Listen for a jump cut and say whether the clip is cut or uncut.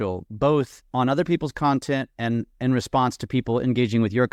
uncut